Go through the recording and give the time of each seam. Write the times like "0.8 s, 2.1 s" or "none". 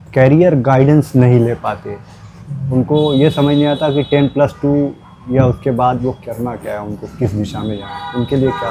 none